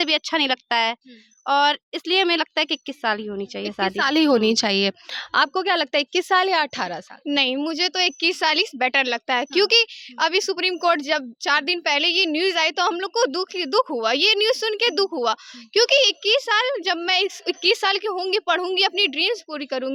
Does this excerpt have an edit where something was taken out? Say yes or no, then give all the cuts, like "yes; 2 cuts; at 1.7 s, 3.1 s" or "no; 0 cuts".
no; 0 cuts